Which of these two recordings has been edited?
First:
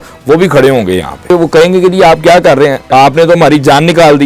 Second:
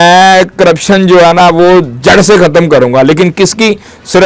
first; 2 cuts; at 1.3 s, 2.8 s

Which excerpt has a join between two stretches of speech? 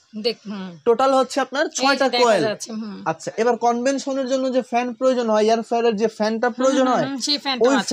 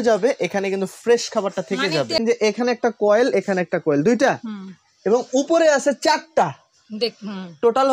second; 1 cut; at 2.2 s

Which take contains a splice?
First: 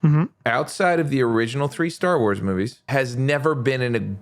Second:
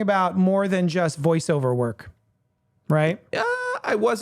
first; 1 cut; at 2.8 s

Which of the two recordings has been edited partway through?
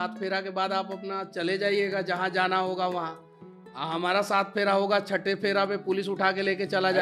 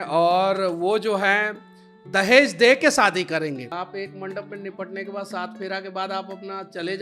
second; 1 cut; at 3.7 s

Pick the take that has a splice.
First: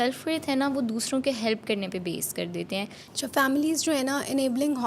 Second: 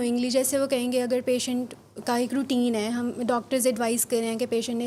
first; 1 cut; at 3.0 s

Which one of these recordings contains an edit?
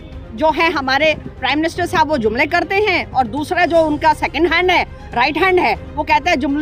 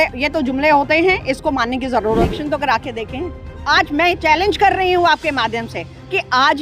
second; 1 cut; at 2.3 s

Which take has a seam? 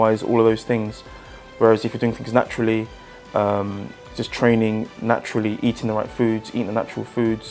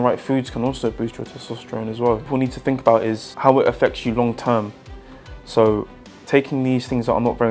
second; 2 cuts; at 2.3 s, 3.3 s

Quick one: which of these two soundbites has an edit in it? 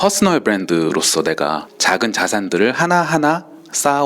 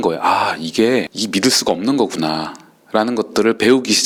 first; 1 cut; at 1.7 s

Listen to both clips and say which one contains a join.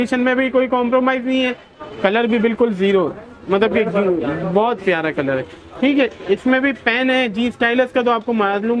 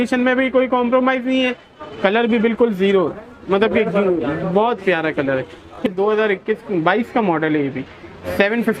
second; 1 cut; at 5.8 s

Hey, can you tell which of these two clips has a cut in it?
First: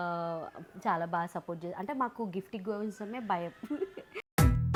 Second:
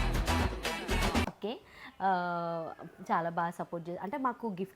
second; 1 cut; at 1.2 s

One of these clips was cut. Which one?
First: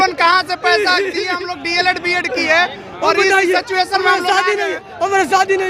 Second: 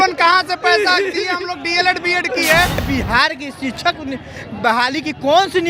second; 1 cut; at 2.9 s

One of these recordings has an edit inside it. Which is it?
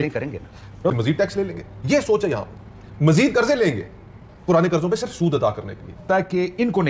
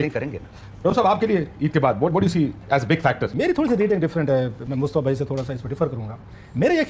first; 2 cuts; at 0.9 s, 6.1 s

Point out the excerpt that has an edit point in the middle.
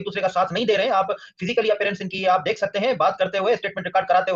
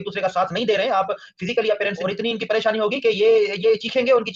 second; 1 cut; at 2.1 s

